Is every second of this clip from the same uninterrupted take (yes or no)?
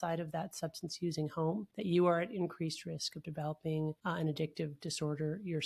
no